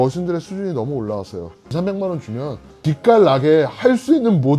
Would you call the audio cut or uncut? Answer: cut